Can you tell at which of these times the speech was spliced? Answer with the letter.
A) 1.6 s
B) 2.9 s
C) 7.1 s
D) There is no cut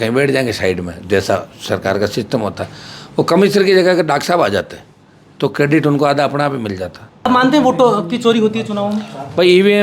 C